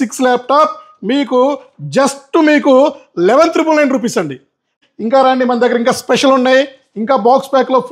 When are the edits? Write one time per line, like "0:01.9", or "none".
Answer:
0:04.8